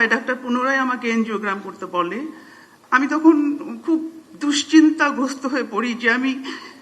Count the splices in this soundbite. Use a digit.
0